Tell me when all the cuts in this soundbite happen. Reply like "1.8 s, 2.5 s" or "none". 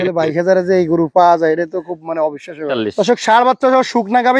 2.7 s

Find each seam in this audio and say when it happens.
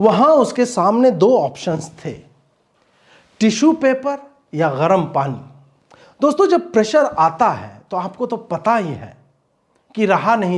none

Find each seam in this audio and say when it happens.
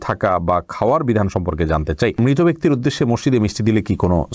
2.2 s

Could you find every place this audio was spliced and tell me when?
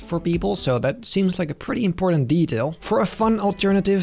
2.8 s

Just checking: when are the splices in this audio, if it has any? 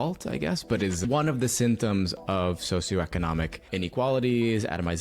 1.0 s, 3.6 s

